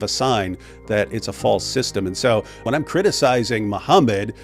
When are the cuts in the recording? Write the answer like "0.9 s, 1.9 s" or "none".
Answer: 2.6 s